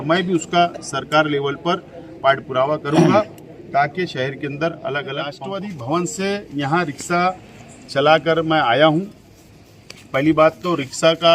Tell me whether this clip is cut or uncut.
cut